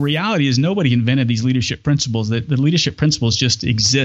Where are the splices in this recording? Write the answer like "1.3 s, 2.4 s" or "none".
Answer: none